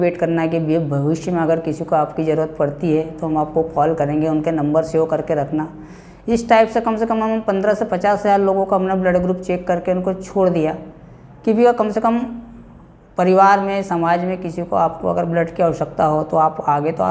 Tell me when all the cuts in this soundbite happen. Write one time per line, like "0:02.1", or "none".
none

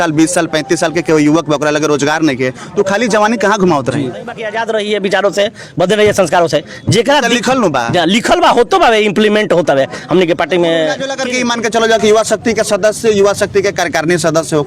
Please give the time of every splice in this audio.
0:04.5
0:11.1

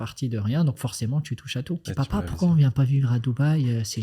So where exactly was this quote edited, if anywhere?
0:01.9

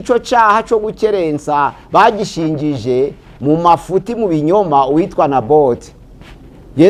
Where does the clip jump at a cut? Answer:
none

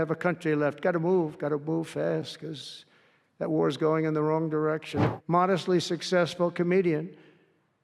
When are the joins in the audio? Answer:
0:05.0

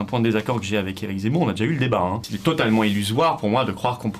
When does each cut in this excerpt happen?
0:02.3

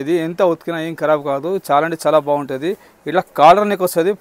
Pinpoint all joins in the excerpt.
none

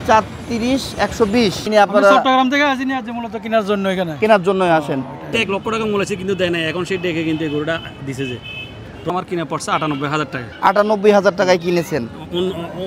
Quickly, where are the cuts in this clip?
0:01.6
0:05.3
0:09.1

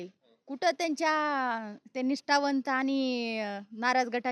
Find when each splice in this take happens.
none

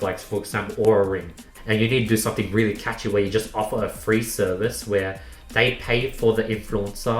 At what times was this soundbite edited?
0:01.5

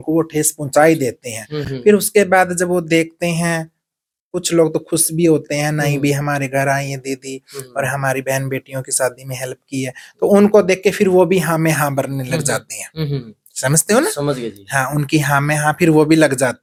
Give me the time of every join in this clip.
none

